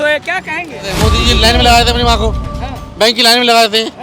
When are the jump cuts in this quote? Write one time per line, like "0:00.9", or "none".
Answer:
0:00.9